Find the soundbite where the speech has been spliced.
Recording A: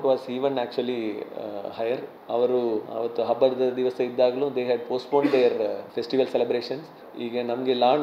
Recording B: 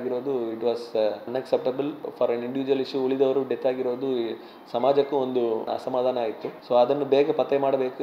A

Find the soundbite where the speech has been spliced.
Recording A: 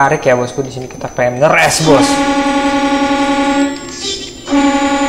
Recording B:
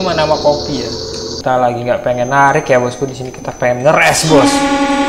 B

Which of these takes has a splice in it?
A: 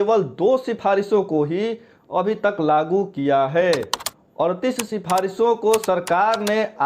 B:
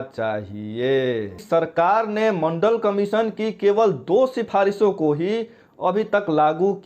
B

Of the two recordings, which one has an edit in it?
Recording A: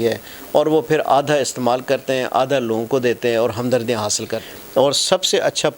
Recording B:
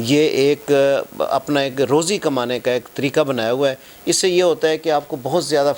A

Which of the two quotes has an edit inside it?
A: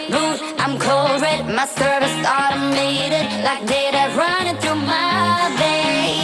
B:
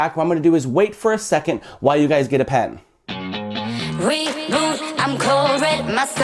B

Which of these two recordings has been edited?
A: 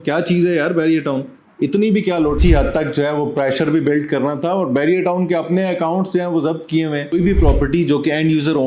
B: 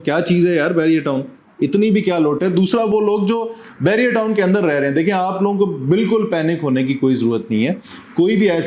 A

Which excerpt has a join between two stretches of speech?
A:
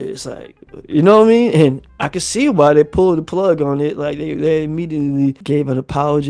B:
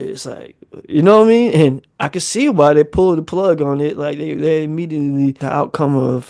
B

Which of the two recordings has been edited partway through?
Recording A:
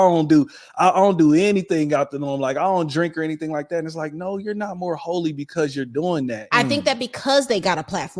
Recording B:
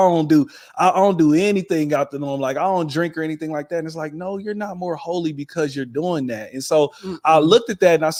A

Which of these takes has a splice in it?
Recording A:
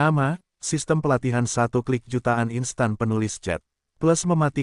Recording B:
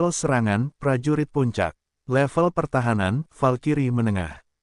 B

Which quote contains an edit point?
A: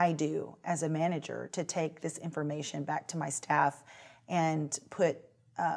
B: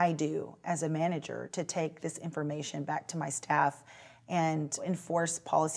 B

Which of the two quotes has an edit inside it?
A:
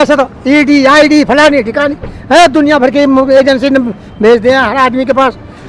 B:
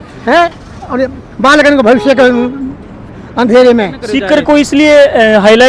B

